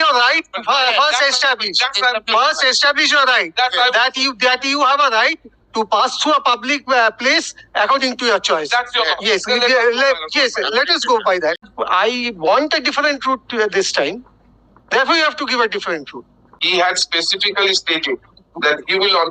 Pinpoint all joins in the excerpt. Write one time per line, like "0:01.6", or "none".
0:11.7
0:16.6

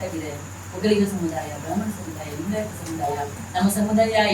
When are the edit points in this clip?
0:03.4

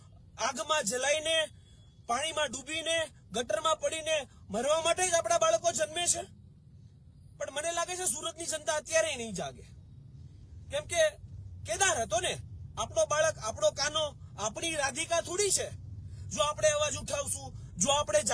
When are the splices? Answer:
none

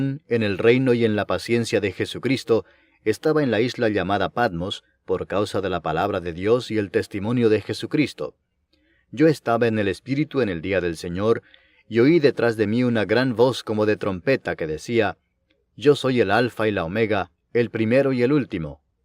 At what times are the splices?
none

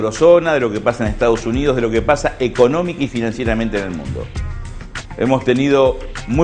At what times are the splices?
0:01.8

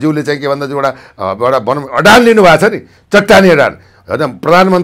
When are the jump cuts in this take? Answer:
none

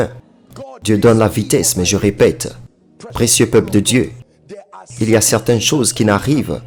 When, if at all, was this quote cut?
none

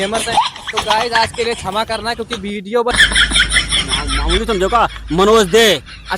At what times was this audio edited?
0:03.0

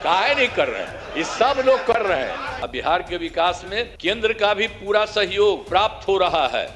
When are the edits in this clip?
0:02.5
0:03.9
0:05.6

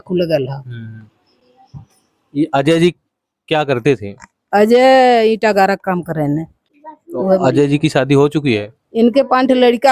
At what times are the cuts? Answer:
none

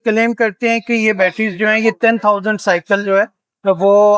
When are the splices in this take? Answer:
none

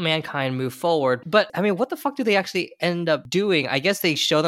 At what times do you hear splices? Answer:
0:01.3
0:03.3

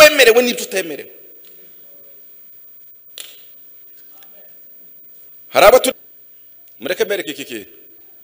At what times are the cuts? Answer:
0:06.0

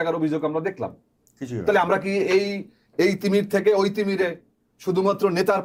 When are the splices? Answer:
none

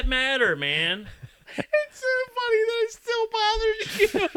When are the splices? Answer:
0:01.4

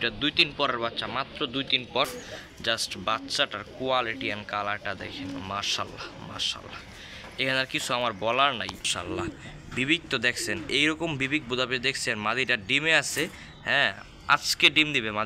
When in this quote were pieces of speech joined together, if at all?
0:02.2
0:08.9

